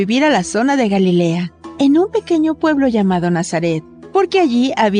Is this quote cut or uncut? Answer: uncut